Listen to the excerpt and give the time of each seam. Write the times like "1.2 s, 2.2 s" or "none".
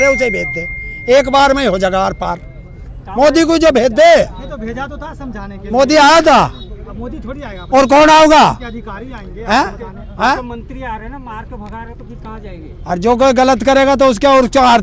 none

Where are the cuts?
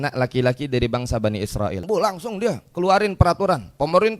1.8 s

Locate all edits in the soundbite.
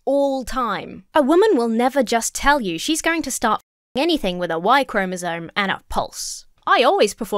0.9 s

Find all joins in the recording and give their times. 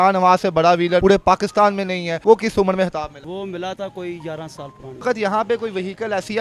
1.0 s, 2.1 s, 3.2 s, 5.0 s

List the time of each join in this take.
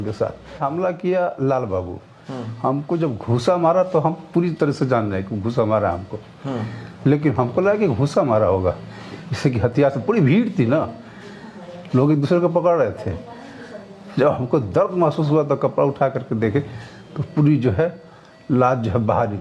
none

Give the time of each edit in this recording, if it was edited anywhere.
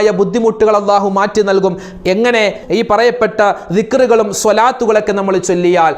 2.6 s

